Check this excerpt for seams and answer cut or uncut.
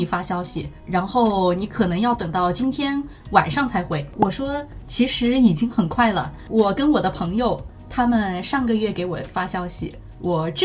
cut